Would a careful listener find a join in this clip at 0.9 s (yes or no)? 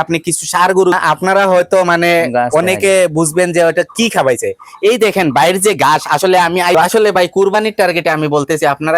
yes